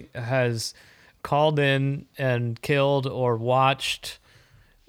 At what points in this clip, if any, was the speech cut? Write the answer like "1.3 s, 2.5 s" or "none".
2.1 s